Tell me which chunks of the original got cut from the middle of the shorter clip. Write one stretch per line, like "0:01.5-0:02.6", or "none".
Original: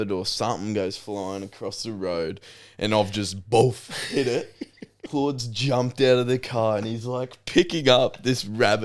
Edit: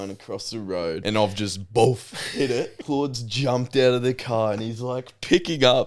0:02.3-0:02.8
0:04.5-0:05.0